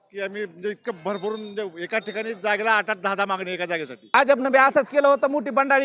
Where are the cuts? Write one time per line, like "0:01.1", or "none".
0:04.1